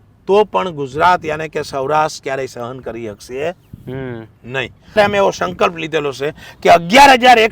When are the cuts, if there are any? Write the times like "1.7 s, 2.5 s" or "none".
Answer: 5.0 s